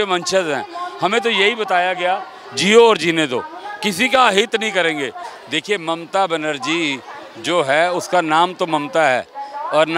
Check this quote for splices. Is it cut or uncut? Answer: cut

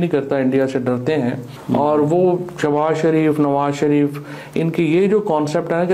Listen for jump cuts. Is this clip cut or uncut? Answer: cut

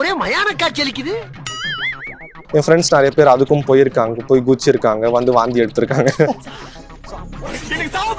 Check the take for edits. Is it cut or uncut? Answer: cut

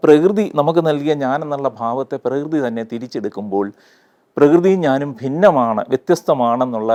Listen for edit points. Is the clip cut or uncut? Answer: uncut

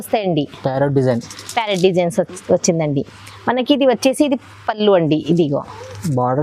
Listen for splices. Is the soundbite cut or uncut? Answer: uncut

